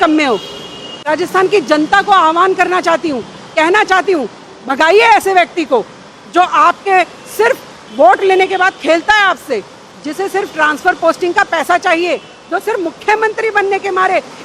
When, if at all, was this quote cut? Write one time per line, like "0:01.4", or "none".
0:00.9